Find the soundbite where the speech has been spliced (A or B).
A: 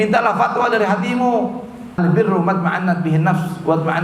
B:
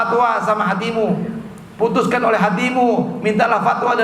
A